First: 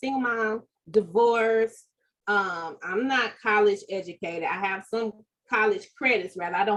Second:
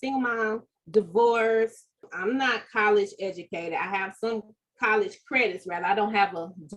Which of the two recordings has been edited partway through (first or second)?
second